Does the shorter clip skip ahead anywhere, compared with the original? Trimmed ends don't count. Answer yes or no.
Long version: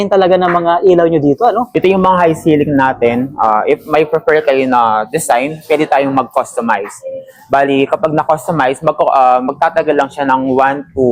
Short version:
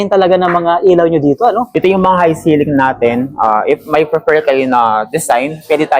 no